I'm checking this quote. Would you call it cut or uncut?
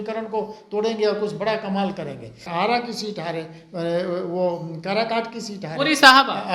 cut